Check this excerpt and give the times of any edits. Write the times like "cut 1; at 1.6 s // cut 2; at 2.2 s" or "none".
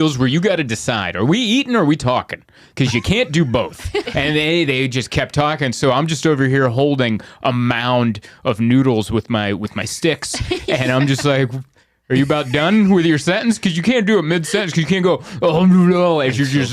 cut 1; at 4.1 s

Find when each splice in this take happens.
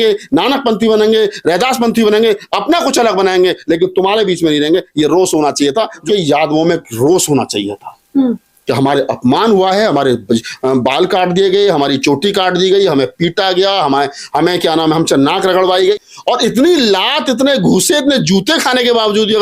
cut 1; at 6.0 s // cut 2; at 16.0 s

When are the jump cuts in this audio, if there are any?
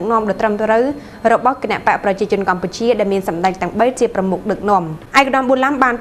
cut 1; at 5.0 s

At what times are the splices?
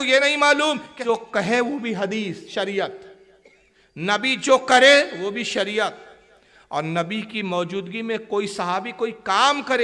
cut 1; at 0.9 s

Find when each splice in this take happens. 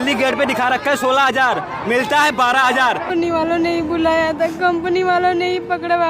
cut 1; at 3.1 s

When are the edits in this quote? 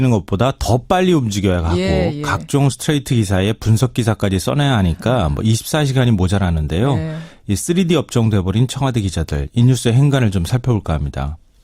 cut 1; at 7.8 s

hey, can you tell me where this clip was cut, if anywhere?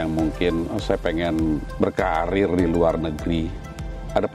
none

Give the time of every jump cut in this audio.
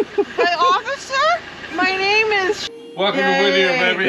cut 1; at 2.7 s

